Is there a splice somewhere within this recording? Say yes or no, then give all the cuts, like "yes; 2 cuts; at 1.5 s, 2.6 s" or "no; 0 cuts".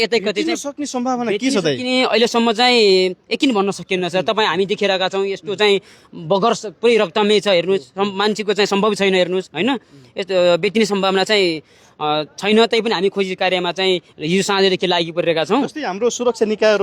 no; 0 cuts